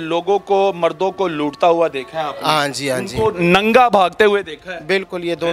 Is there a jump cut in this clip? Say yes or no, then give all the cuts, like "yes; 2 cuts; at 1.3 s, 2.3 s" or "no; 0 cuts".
no; 0 cuts